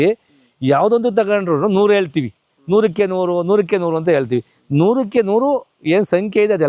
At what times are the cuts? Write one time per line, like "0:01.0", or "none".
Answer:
none